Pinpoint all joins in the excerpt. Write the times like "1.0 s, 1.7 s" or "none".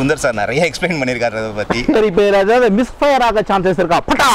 1.9 s